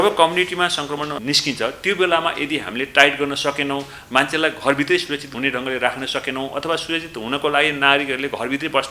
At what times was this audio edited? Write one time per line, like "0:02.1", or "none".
0:01.2